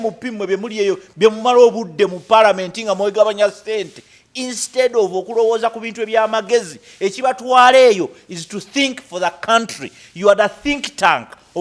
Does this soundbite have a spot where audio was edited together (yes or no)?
no